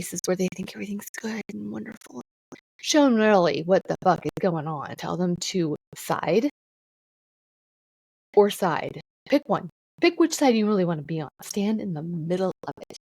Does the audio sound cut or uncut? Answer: cut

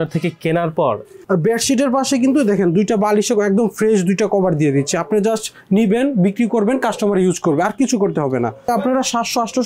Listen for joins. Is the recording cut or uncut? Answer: cut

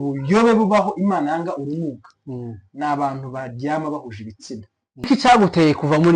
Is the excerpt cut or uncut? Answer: cut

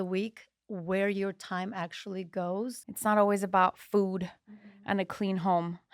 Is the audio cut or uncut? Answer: cut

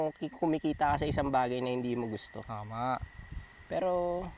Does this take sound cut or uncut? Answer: uncut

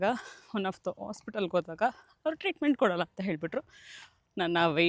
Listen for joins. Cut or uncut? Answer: uncut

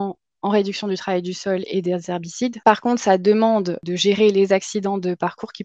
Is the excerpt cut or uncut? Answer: cut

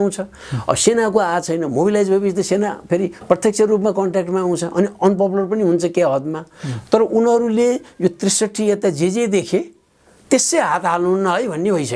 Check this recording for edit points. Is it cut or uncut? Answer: uncut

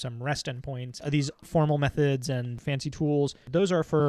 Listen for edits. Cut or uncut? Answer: cut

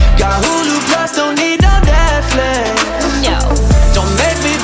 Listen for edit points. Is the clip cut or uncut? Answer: uncut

